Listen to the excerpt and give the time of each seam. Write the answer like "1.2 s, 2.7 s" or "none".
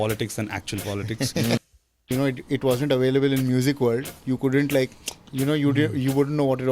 1.6 s

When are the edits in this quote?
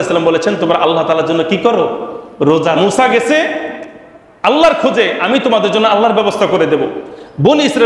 2.8 s

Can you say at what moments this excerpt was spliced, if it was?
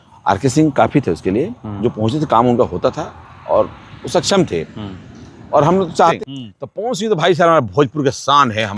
6.2 s

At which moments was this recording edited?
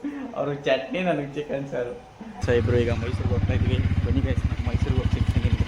2.4 s

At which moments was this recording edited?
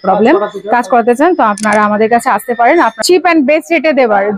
3.0 s

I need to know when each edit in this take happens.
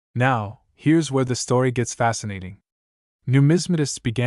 1.5 s

